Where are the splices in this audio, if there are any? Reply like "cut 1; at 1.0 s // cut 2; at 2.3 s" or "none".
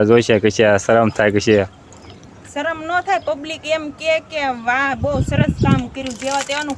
none

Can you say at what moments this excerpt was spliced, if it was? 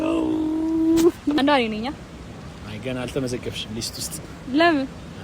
cut 1; at 1.4 s

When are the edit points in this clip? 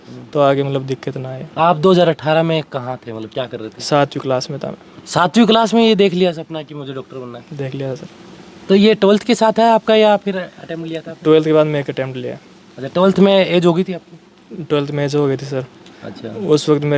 none

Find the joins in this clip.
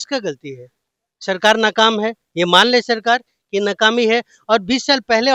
none

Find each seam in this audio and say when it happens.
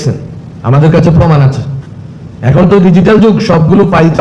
none

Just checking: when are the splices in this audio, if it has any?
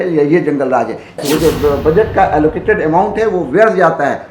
cut 1; at 1.2 s

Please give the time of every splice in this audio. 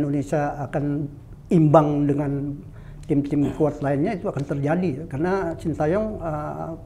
none

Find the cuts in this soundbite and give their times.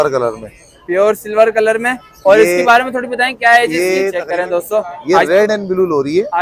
cut 1; at 4.2 s

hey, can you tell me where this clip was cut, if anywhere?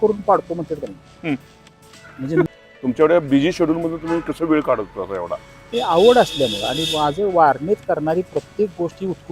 cut 1; at 2.5 s

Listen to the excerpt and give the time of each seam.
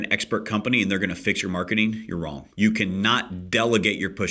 cut 1; at 2.4 s

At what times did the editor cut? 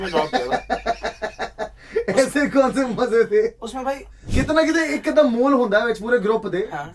cut 1; at 4.2 s

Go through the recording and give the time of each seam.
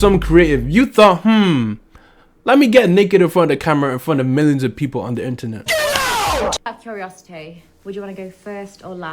cut 1; at 6.7 s

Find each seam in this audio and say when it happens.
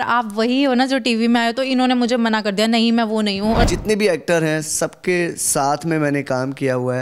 cut 1; at 3.7 s

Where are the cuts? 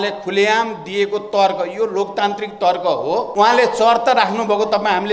cut 1; at 3.3 s

